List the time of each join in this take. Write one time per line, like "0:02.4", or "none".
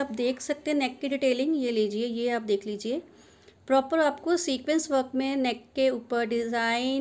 none